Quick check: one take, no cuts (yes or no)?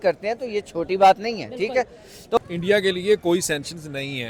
no